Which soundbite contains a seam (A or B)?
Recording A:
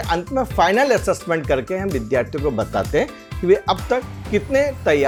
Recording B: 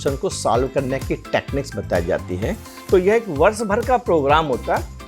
B